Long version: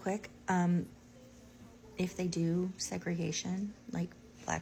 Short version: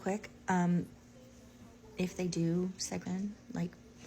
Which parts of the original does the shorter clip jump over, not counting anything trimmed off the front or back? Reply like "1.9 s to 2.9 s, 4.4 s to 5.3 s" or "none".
3.0 s to 3.4 s